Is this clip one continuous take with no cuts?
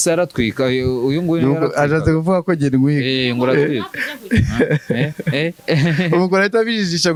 yes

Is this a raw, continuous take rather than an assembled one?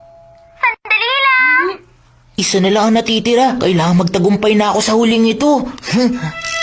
yes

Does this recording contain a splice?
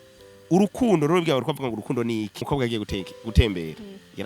yes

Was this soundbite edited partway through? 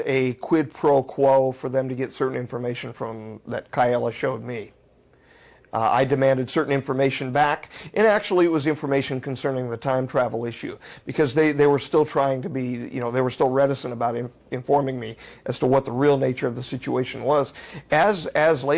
no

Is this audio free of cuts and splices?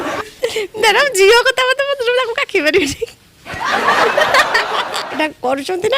no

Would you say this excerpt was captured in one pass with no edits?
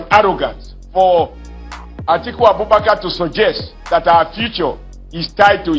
yes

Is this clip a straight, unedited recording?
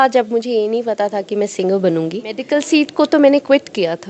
no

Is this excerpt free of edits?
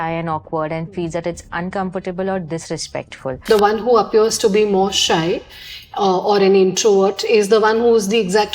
no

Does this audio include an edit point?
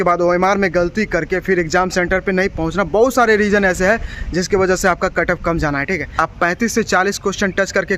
yes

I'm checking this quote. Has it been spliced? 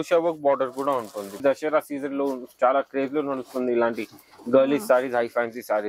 yes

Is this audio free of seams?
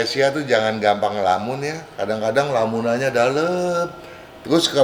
yes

